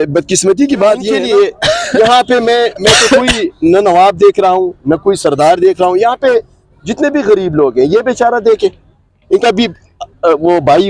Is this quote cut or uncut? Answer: cut